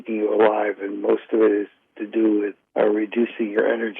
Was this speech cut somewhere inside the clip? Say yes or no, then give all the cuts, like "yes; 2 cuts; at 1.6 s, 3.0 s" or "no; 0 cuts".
no; 0 cuts